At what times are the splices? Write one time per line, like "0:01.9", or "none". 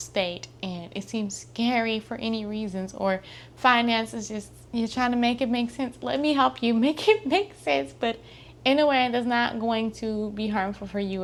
none